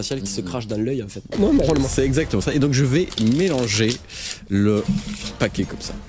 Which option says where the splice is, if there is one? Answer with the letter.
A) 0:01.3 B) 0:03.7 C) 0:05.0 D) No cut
A